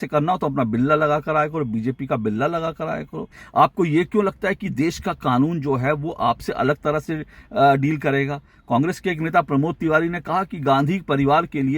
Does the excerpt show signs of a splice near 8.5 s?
no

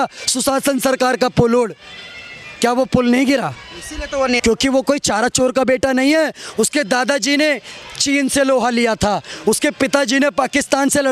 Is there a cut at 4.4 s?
yes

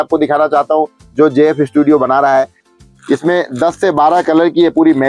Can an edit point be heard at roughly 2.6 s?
yes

